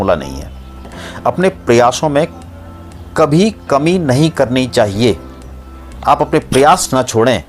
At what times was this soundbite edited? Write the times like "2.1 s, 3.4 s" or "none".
1.0 s

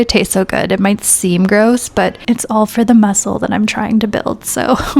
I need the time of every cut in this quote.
2.2 s

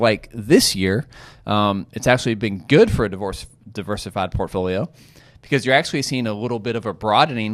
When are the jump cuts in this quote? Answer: none

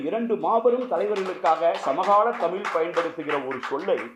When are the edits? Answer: none

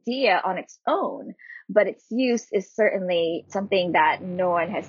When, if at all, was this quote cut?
none

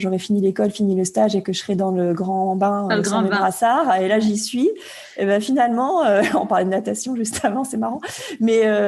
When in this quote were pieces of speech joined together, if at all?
none

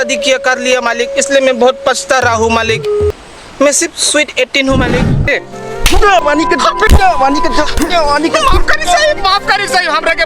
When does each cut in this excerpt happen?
3.1 s, 5.3 s

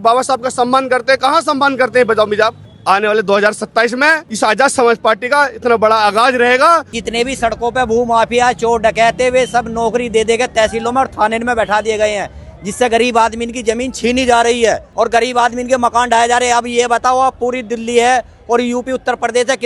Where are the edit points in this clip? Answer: 2.7 s, 4.3 s, 6.9 s, 14.9 s

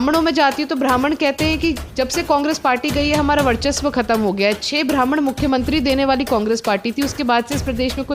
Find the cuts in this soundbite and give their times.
none

